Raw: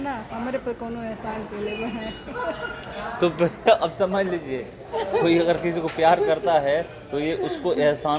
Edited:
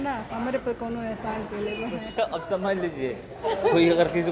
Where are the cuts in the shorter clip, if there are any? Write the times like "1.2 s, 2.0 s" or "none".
2.1 s